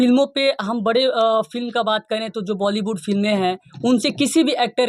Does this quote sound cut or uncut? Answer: uncut